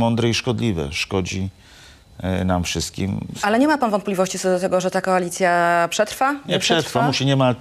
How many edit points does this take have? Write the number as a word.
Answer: one